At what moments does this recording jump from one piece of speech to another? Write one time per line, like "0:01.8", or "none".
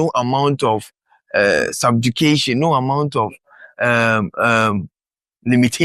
none